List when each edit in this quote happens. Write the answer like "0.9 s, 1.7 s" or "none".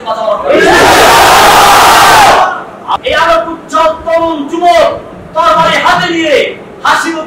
3.0 s